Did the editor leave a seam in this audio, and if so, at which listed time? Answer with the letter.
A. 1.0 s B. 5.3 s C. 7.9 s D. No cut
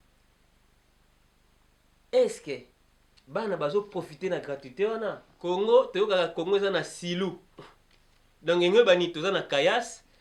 B